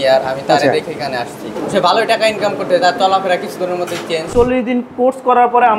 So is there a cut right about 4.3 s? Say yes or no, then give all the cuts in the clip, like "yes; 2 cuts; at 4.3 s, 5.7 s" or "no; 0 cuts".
yes; 2 cuts; at 1.5 s, 4.3 s